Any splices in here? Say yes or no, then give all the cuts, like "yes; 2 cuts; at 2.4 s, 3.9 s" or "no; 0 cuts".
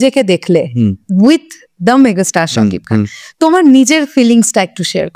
no; 0 cuts